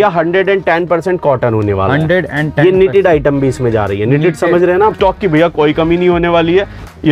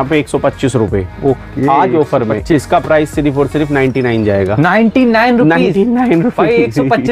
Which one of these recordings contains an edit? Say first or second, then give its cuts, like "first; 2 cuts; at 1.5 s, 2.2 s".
first; 1 cut; at 5.0 s